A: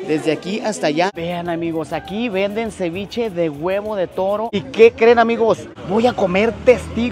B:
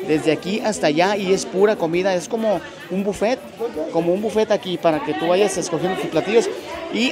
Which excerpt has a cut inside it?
A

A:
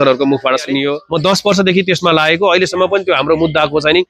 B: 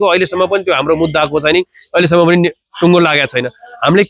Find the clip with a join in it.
A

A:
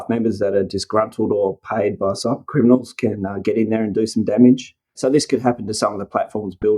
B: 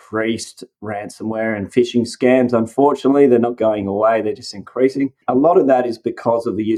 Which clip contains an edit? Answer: A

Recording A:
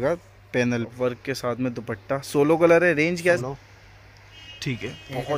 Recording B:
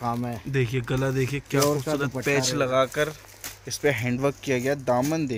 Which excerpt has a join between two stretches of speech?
A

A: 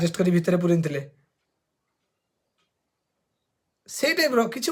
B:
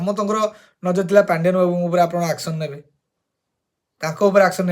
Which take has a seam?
B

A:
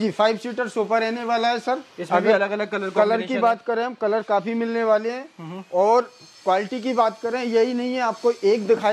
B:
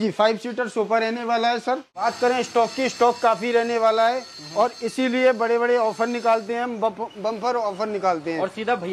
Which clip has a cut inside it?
B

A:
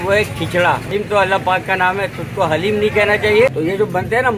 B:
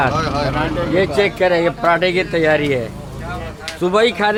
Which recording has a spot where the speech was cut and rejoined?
A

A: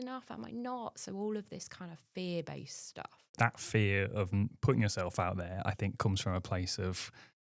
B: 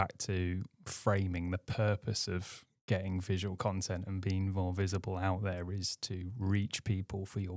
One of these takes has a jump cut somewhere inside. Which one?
A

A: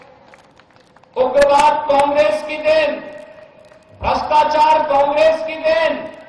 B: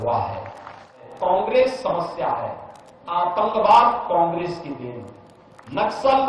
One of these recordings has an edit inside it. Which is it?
B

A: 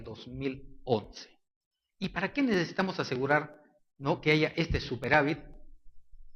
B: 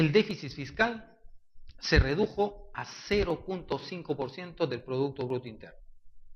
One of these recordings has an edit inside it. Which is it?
B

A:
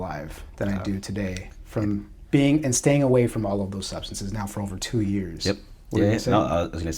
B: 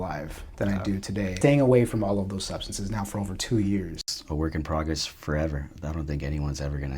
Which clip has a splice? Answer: B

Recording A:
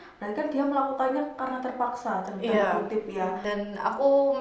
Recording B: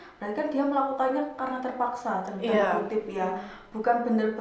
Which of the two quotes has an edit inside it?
A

